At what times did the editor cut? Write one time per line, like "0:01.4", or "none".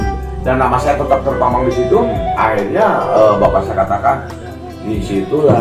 none